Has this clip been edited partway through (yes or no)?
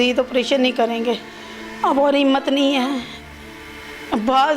yes